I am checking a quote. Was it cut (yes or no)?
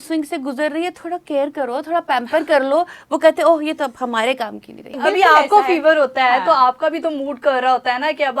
yes